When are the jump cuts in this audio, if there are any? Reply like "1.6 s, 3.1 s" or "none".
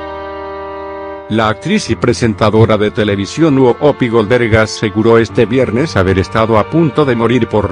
1.2 s